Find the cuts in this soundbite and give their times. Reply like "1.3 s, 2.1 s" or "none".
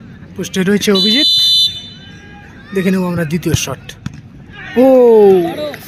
3.3 s, 5.1 s